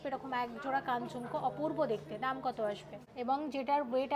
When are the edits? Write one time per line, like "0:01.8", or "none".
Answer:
0:03.0